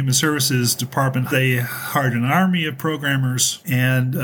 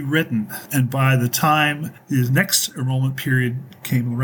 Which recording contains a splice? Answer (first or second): first